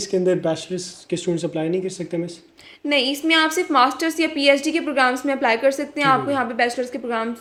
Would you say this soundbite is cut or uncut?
uncut